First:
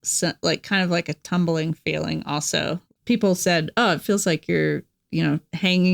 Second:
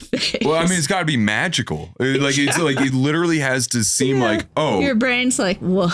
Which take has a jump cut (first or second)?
first